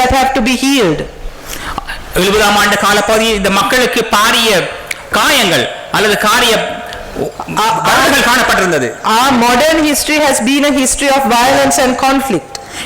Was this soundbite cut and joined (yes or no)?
no